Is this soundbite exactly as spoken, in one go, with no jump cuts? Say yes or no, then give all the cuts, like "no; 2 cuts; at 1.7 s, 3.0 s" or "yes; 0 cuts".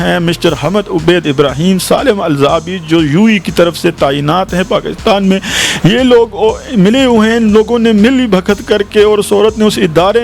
yes; 0 cuts